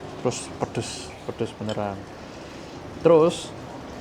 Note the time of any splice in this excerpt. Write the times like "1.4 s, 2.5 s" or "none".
none